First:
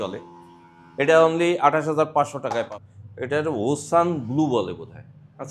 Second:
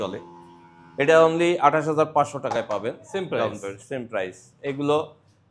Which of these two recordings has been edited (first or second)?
first